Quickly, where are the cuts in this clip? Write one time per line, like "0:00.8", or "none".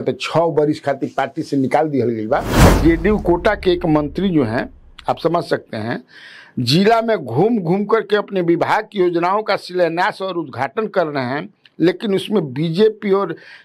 0:02.7

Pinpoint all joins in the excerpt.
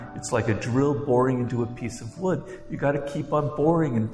none

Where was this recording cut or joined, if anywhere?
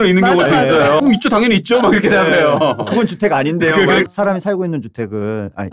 0:01.0
0:04.0

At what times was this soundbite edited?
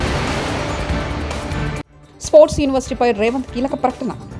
0:02.0

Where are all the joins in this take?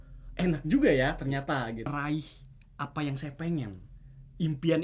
0:01.9

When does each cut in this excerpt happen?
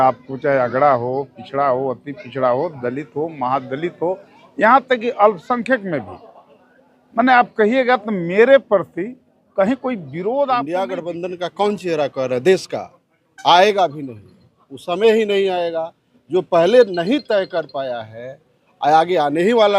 0:10.7

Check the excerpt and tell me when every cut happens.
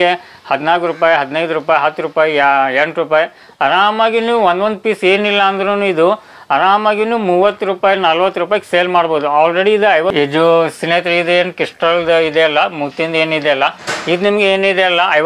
0:10.1

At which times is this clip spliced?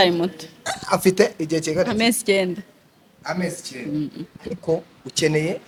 none

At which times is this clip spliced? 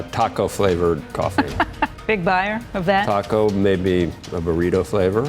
0:01.0
0:02.4

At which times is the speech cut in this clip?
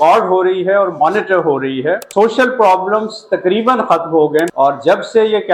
0:02.0
0:04.5

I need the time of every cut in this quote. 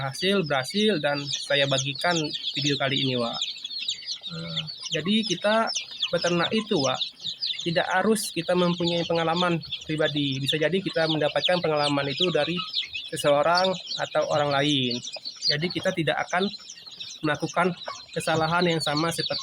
none

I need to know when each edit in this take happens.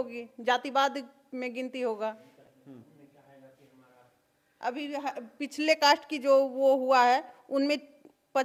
none

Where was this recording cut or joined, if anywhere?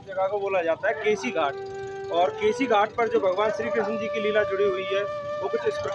none

